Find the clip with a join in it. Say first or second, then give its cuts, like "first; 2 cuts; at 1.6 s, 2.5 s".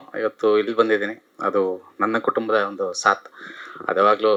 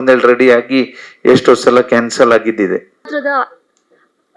second; 1 cut; at 3.1 s